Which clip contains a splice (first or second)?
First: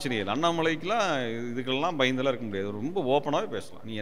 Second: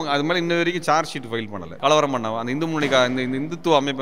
second